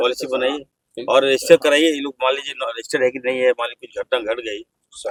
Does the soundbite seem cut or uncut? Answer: uncut